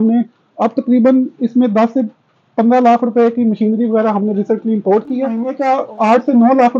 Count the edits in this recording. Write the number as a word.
one